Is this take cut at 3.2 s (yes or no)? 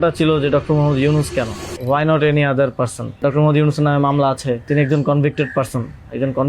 yes